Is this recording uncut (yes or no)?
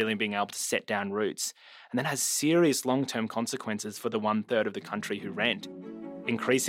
no